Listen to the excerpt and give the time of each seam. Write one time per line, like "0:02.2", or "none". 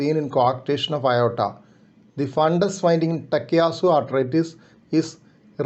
none